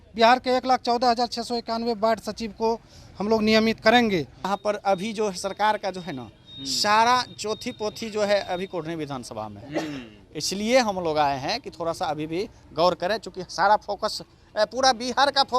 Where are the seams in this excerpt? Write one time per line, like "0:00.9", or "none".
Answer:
0:04.5